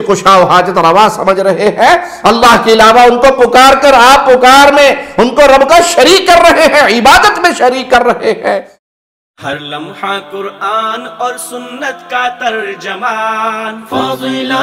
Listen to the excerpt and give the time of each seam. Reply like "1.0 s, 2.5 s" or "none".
2.1 s, 8.7 s